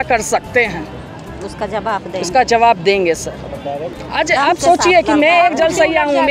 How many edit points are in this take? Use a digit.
0